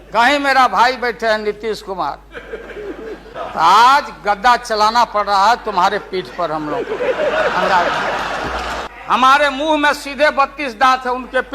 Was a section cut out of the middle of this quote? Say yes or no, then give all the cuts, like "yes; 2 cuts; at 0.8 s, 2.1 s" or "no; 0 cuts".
yes; 2 cuts; at 3.3 s, 8.8 s